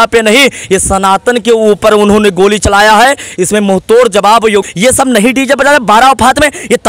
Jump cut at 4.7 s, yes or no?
yes